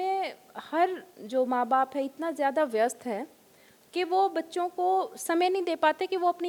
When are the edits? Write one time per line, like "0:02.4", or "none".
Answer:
none